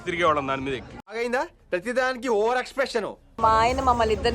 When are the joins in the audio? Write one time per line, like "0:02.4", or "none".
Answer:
0:03.4